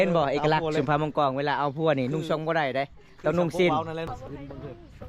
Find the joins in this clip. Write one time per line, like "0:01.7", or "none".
0:04.1